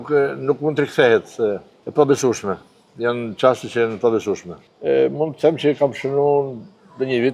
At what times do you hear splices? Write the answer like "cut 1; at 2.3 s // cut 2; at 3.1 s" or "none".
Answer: cut 1; at 1.7 s // cut 2; at 4.5 s